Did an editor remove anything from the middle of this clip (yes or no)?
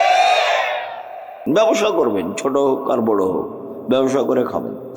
yes